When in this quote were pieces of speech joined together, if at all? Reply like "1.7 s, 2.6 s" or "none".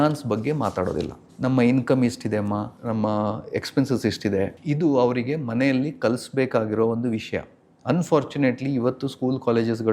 1.2 s, 2.7 s, 4.6 s